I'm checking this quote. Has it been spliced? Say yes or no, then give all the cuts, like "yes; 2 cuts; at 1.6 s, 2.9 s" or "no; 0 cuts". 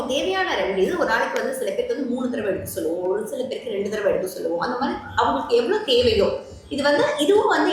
no; 0 cuts